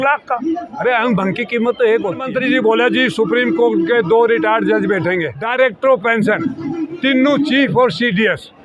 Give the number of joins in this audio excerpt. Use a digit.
2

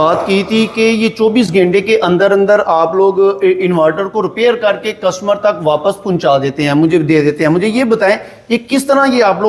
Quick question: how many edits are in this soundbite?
0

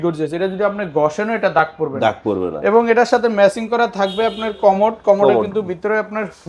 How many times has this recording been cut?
0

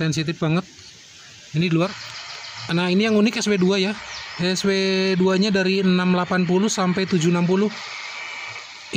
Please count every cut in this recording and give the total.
1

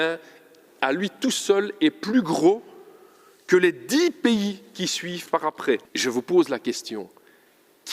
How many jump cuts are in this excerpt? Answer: 1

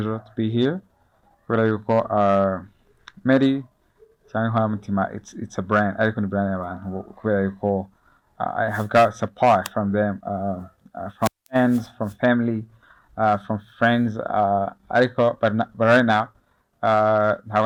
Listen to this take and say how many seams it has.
0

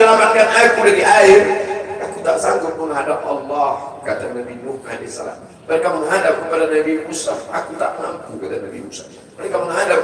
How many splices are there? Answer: 0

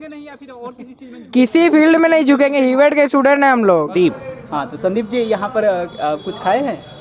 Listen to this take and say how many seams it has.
1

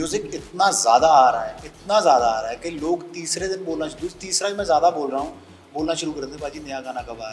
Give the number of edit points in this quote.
0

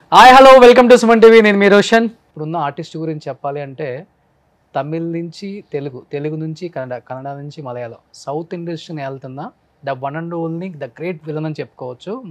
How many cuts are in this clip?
1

